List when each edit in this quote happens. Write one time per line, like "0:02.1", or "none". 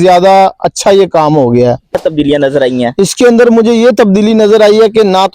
0:01.9